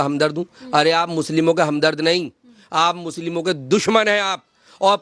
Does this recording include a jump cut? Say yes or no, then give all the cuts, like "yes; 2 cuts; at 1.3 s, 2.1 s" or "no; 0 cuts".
no; 0 cuts